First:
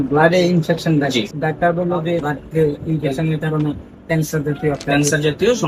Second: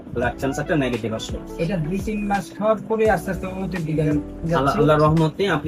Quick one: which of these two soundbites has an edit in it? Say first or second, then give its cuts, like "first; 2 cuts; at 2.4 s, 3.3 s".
first; 2 cuts; at 1.3 s, 2.3 s